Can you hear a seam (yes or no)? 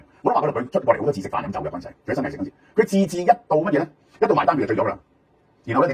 no